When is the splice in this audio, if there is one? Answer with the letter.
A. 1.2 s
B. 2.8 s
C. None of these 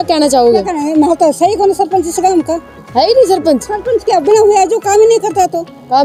C